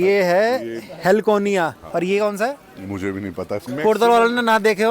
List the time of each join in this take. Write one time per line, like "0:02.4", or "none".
0:01.8
0:03.6